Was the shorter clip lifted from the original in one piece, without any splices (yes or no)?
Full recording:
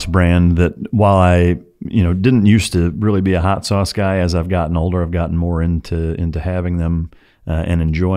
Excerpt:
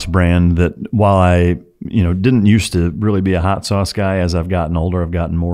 yes